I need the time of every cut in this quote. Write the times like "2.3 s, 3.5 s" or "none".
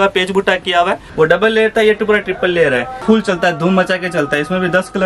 1.0 s, 3.0 s